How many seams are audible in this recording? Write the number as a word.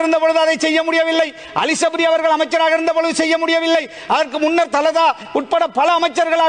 zero